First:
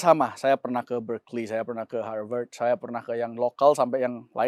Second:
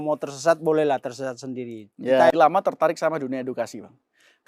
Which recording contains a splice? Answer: second; 1 cut; at 2.3 s

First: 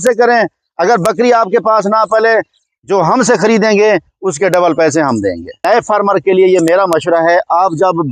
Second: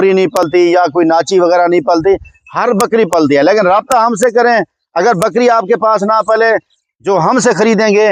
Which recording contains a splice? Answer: first; 1 cut; at 5.6 s

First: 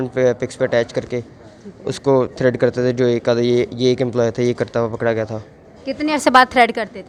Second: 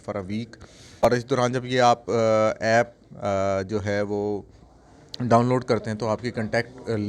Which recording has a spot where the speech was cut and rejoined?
second; 1 cut; at 1.0 s

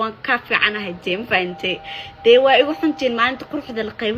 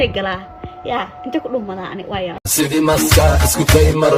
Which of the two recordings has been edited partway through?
second; 1 cut; at 2.4 s

